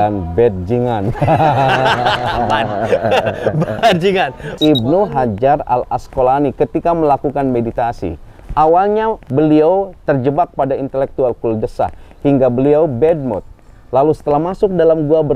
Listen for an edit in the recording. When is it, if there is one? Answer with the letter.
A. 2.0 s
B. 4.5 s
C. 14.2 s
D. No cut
B